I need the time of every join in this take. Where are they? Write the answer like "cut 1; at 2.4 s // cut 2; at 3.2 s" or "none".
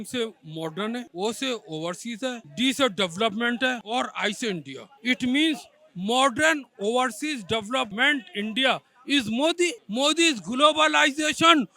cut 1; at 1.1 s // cut 2; at 3.8 s // cut 3; at 7.9 s